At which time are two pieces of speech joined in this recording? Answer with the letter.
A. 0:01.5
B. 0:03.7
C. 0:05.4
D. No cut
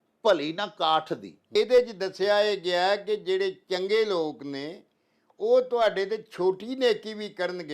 A